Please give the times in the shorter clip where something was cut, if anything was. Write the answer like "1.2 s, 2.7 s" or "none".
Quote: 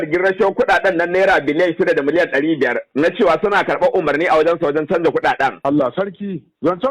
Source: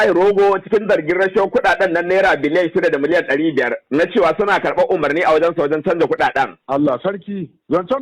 5.6 s